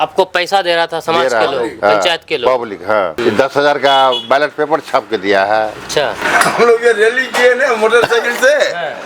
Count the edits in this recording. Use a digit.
1